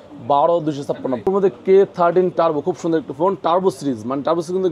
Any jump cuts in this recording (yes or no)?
yes